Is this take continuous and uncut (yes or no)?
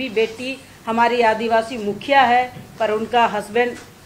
yes